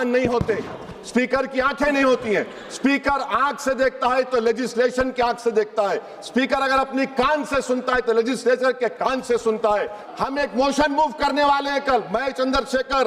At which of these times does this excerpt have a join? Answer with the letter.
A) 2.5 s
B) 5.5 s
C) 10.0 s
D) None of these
C